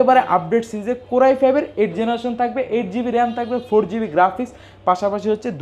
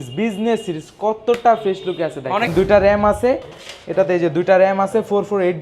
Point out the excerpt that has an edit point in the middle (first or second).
second